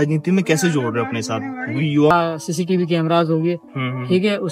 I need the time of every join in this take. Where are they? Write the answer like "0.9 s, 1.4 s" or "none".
2.1 s

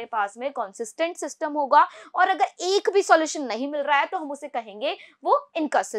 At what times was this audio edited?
none

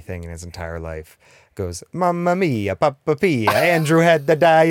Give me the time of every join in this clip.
none

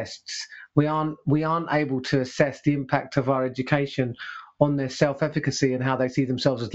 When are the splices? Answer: none

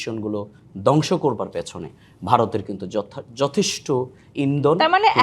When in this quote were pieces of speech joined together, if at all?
none

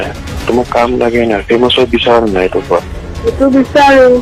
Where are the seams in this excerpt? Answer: none

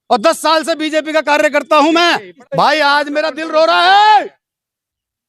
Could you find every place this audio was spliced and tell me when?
2.3 s

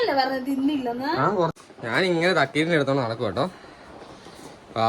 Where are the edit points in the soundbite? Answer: 1.5 s

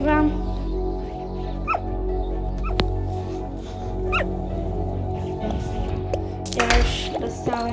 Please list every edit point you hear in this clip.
5.4 s

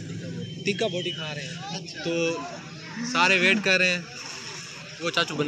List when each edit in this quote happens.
none

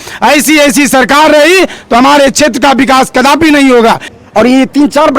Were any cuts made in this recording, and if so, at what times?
4.1 s

